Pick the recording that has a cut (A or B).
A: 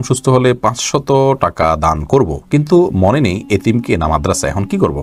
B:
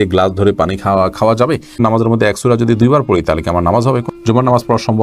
B